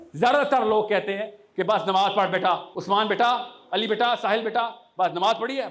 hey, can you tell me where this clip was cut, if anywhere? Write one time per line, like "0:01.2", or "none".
0:02.7